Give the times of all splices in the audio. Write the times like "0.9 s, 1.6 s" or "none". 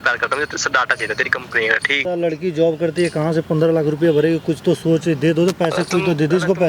2.0 s